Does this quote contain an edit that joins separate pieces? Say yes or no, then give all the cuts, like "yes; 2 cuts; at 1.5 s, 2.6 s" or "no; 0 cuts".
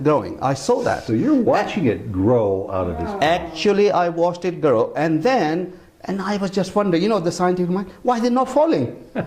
no; 0 cuts